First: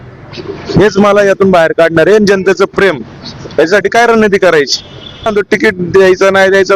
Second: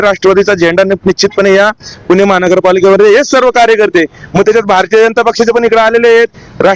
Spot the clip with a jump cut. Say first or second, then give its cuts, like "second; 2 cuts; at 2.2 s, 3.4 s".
first; 1 cut; at 5.3 s